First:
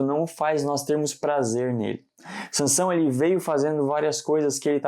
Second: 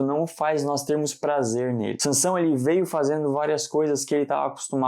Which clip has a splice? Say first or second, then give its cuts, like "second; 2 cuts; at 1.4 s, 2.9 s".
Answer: second; 1 cut; at 2.0 s